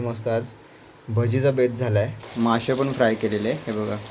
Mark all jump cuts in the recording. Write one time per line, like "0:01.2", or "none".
0:02.2